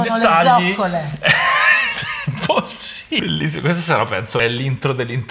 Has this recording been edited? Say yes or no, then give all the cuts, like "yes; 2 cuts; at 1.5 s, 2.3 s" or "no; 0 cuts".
yes; 1 cut; at 4.4 s